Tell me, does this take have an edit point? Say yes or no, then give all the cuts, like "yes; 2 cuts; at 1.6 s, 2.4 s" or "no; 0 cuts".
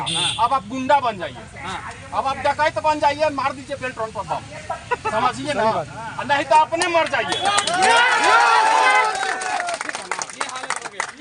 no; 0 cuts